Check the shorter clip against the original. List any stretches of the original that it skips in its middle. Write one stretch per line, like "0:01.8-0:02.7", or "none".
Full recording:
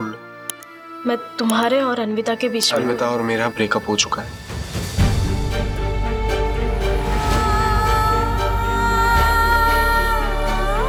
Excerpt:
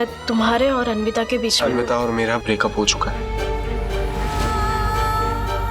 0:04.3-0:06.1